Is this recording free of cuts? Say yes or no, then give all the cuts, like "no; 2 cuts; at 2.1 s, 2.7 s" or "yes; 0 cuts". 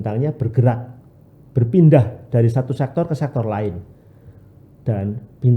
yes; 0 cuts